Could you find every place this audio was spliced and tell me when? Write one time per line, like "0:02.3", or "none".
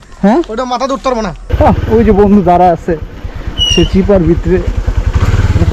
0:01.4